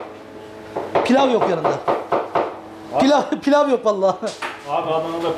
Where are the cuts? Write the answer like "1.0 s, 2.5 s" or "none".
none